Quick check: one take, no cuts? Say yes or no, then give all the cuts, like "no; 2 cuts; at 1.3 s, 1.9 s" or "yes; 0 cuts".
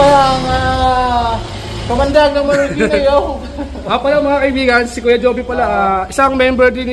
yes; 0 cuts